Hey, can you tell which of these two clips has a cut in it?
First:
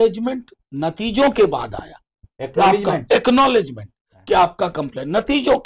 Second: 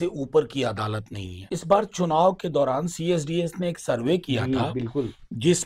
second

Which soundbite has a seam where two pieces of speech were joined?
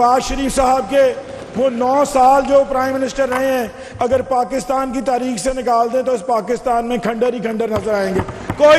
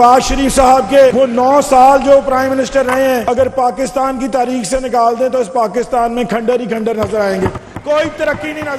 second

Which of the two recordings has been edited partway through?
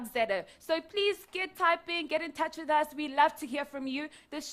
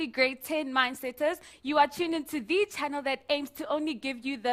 first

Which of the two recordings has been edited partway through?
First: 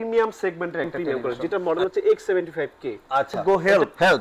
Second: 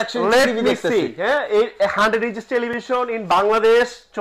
first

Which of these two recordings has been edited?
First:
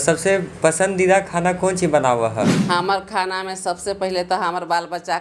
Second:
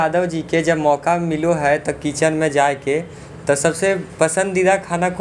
first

